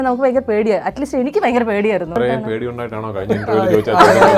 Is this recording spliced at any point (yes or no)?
yes